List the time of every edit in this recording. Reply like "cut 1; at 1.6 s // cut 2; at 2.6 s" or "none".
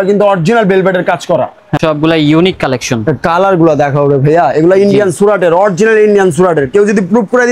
cut 1; at 1.6 s